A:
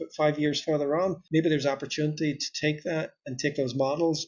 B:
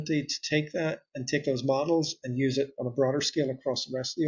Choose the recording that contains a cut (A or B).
A